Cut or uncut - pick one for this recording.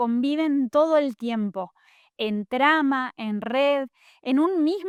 uncut